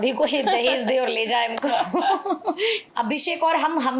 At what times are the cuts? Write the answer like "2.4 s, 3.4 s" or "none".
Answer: 2.8 s